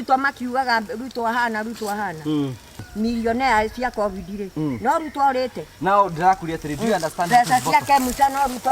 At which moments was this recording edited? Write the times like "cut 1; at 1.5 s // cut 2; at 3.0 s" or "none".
cut 1; at 2.8 s